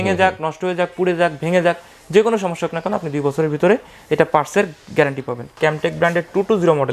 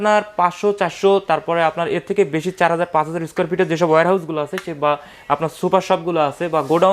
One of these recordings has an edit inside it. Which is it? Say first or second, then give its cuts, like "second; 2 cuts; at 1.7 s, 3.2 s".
first; 1 cut; at 5.5 s